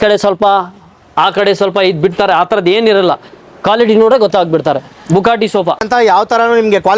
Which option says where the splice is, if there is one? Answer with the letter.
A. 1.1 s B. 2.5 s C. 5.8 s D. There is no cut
C